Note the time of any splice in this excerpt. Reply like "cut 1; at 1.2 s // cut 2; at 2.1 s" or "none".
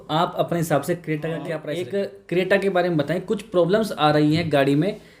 cut 1; at 1.6 s